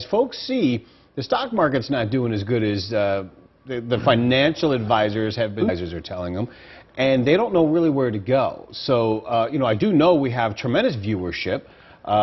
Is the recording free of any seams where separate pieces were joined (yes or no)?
yes